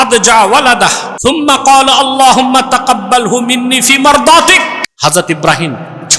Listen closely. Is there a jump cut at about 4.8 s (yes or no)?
yes